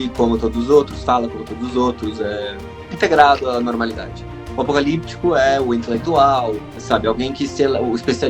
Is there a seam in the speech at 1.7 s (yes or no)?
no